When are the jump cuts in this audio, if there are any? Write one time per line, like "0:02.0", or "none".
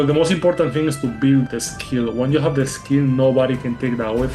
0:01.5